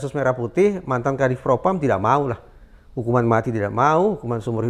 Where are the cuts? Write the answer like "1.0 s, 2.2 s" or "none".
none